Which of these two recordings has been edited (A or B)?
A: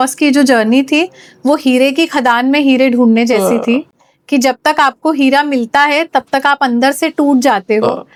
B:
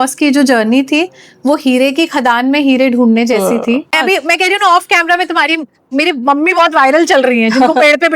B